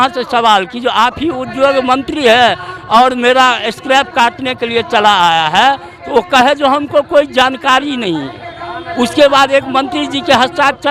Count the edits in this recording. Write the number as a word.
zero